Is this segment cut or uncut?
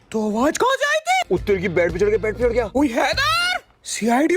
cut